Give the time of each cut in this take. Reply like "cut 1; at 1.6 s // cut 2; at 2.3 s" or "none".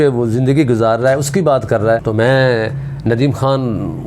cut 1; at 2.0 s

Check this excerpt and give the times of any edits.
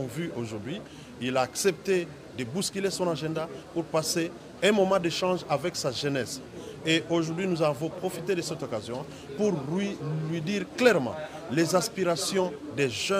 none

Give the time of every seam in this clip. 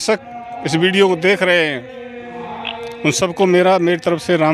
none

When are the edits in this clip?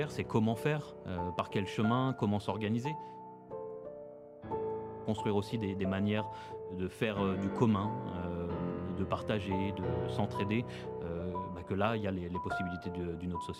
none

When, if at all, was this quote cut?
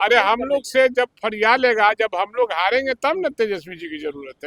none

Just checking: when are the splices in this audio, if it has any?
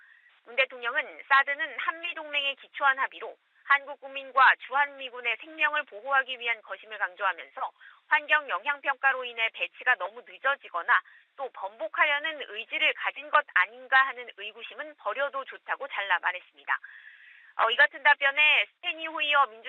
cut 1; at 8.9 s

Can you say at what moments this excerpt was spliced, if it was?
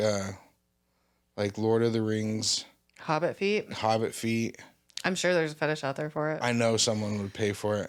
none

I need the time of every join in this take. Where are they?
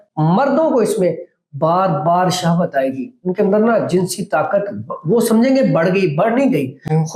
none

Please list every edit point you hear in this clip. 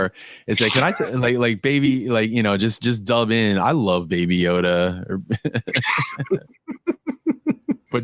none

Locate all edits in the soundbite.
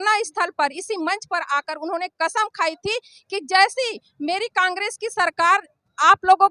none

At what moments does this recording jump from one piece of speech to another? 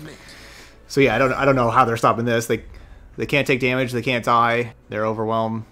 cut 1; at 4.8 s

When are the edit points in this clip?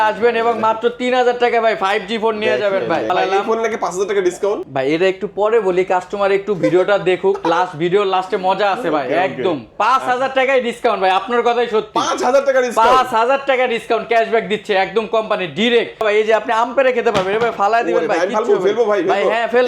cut 1; at 3.1 s // cut 2; at 4.7 s // cut 3; at 16.0 s

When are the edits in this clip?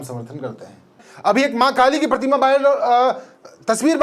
cut 1; at 1.1 s

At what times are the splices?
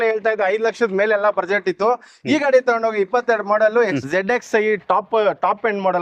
cut 1; at 3.9 s

